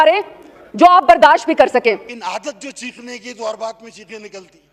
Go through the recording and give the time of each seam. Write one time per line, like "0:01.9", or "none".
0:02.0